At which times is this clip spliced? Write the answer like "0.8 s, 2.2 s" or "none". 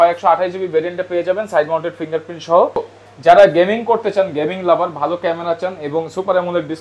2.9 s